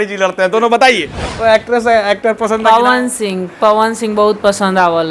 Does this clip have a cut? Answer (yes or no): yes